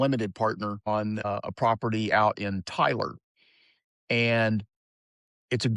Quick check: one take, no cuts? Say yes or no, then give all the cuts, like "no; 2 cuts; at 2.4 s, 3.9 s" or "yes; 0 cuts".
no; 1 cut; at 1.2 s